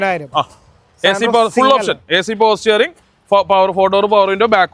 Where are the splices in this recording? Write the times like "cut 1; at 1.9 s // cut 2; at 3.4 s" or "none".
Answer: none